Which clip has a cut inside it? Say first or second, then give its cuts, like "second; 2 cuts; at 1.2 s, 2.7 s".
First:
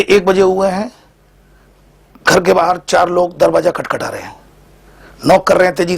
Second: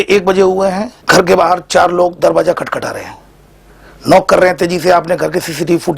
second; 1 cut; at 0.9 s